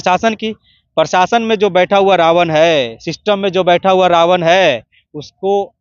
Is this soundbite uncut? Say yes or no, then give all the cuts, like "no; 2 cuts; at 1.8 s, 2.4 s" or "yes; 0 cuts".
yes; 0 cuts